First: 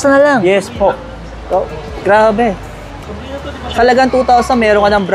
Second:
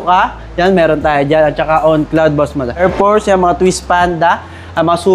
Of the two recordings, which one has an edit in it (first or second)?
second